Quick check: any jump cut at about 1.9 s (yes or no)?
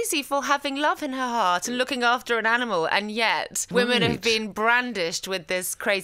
no